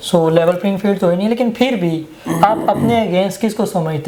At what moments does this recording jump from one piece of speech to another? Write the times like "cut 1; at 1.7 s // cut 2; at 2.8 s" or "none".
none